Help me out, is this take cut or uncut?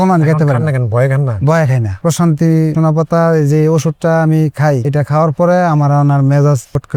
uncut